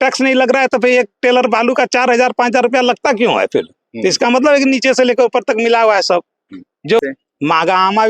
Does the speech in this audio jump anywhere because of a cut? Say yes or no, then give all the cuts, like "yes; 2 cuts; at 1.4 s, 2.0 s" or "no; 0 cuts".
yes; 1 cut; at 7.0 s